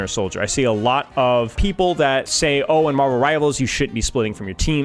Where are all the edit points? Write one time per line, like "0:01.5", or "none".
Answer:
0:01.9